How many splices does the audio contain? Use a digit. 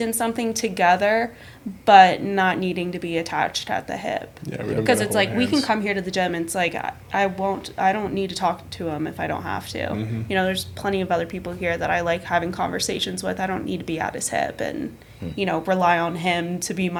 0